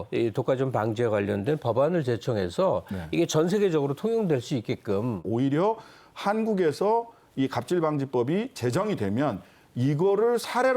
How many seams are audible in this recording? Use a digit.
1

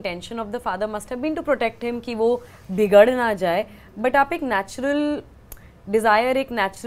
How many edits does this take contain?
0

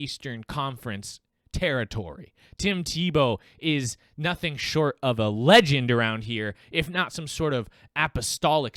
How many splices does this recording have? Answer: 0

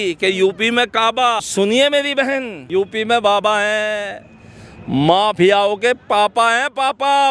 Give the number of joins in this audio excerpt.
2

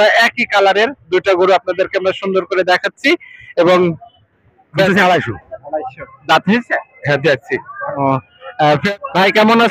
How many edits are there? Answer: 1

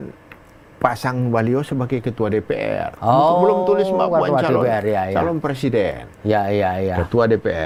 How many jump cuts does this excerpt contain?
0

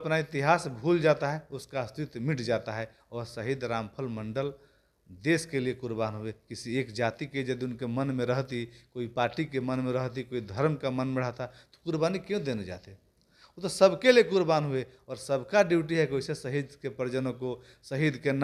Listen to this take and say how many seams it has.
0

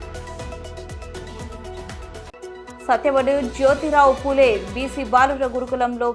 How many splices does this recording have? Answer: 1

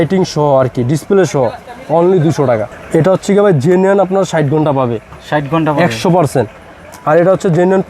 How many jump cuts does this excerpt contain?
1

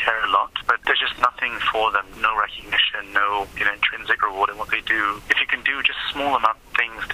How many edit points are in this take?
4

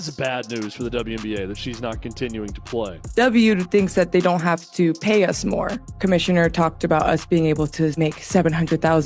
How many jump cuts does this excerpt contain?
2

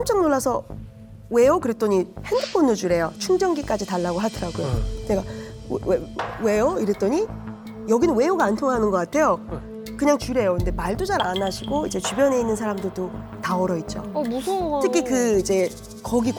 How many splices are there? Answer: 0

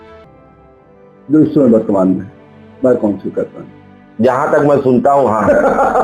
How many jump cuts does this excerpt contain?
1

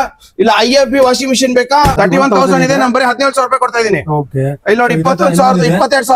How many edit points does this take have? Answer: 1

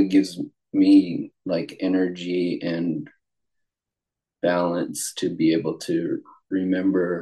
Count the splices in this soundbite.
0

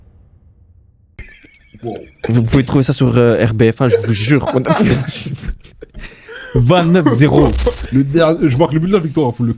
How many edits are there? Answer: 1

